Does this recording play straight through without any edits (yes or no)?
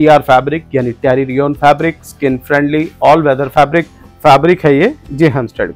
no